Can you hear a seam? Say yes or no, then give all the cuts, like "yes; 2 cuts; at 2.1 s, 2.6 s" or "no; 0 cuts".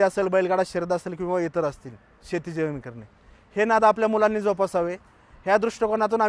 no; 0 cuts